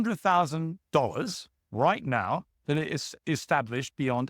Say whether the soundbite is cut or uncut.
cut